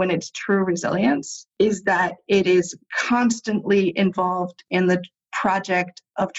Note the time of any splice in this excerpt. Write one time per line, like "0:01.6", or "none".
0:01.4